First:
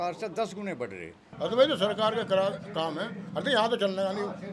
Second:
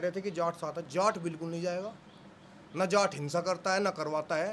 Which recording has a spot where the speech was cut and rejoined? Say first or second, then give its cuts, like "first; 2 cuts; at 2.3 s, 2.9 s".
first; 1 cut; at 1.2 s